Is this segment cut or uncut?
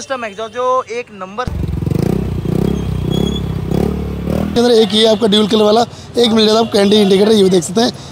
cut